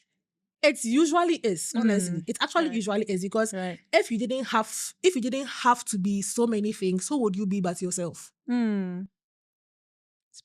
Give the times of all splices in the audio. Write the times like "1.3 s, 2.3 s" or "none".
none